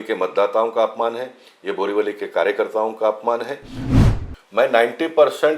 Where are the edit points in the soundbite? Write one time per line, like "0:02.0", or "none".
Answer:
0:04.0